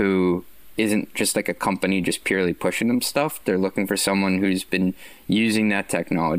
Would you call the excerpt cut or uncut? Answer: uncut